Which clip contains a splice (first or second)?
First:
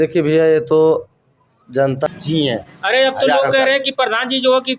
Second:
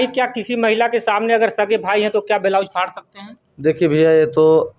first